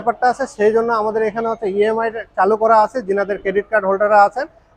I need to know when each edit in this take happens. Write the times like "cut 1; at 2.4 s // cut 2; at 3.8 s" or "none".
none